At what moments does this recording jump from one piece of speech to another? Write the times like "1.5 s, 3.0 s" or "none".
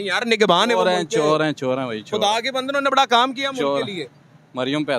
none